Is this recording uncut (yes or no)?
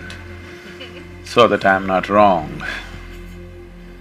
yes